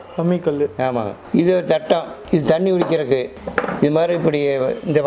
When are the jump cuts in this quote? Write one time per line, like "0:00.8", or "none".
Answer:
0:01.2
0:02.1
0:03.4